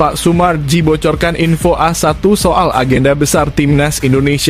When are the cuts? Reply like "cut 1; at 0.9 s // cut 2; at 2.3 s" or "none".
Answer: none